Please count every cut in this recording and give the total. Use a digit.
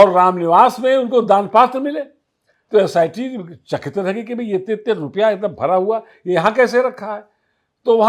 0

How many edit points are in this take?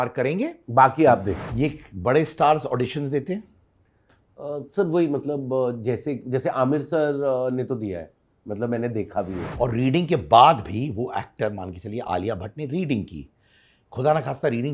2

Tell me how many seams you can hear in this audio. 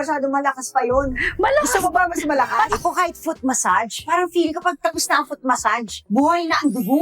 1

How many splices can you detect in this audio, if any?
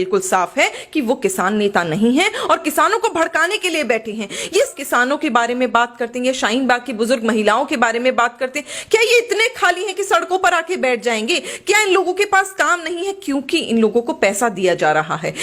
1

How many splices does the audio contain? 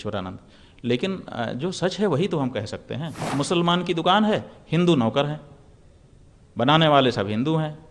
1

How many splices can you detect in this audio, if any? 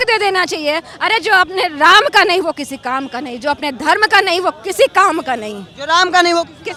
0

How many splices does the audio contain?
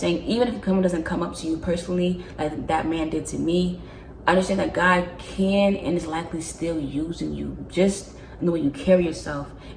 0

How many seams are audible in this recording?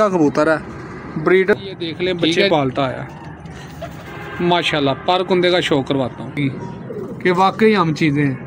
2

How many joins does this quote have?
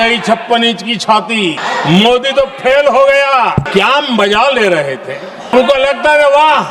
3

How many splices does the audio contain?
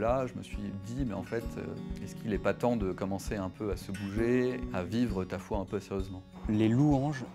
2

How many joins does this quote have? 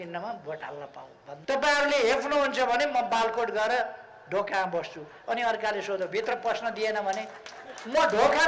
1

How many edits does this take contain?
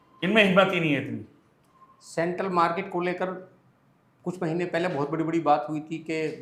0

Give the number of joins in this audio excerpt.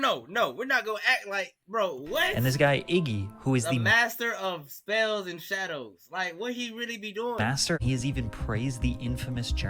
1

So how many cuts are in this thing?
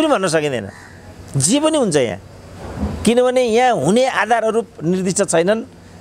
0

